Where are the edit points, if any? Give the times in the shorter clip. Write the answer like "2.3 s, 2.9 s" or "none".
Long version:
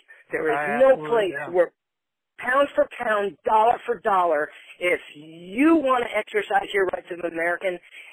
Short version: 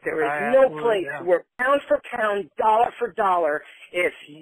1.5 s